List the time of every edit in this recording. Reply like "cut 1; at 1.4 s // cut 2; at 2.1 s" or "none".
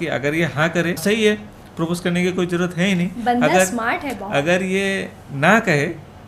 cut 1; at 1.0 s